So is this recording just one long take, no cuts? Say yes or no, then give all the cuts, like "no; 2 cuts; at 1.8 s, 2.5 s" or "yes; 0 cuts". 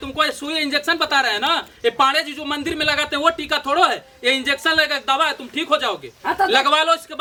yes; 0 cuts